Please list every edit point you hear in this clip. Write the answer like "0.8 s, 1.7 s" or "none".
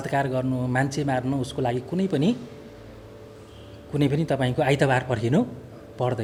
none